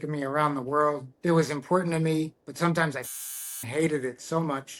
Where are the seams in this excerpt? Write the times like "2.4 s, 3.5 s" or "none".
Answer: 1.1 s